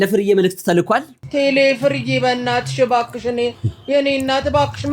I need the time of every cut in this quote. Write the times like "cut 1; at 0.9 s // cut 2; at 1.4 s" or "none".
cut 1; at 1.2 s